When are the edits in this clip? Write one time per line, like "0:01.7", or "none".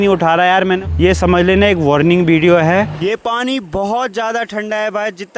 0:00.8
0:03.0